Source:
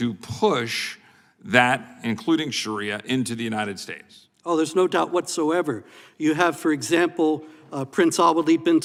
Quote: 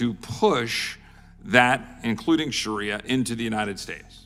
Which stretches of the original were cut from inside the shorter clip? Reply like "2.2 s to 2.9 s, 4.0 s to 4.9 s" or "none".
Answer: none